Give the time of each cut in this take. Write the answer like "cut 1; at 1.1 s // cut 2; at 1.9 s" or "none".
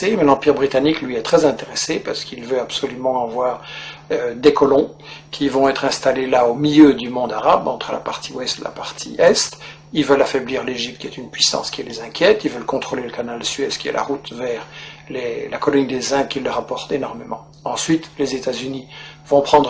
cut 1; at 10.2 s